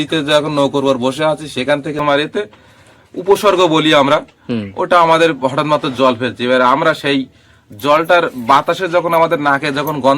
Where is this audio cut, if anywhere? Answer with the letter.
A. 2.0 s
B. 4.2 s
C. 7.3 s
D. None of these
A